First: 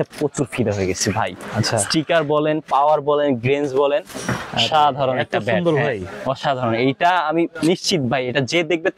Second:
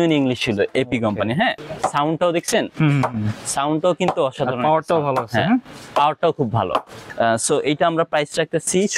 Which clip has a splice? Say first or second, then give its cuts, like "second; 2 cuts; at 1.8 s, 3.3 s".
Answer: second; 2 cuts; at 1.6 s, 7.0 s